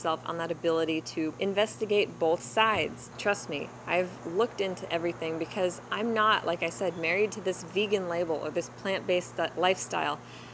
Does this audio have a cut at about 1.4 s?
yes; 2 cuts; at 1.4 s, 3.0 s

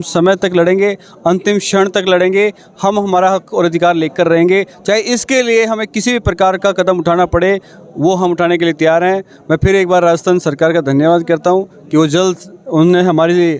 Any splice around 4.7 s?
no; 0 cuts

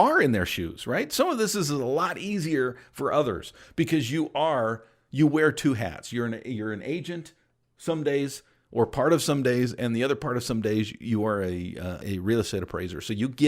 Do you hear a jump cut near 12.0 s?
yes; 1 cut; at 12.0 s

